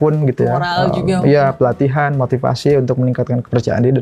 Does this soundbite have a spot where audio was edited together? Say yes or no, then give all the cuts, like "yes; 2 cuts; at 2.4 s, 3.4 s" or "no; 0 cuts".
no; 0 cuts